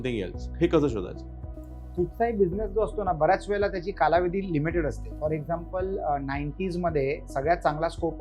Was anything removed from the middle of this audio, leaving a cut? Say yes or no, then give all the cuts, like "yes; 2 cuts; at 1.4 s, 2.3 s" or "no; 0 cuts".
no; 0 cuts